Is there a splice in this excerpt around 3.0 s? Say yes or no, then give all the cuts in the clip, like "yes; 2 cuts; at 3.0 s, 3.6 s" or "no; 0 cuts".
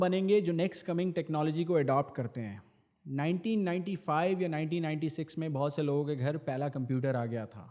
no; 0 cuts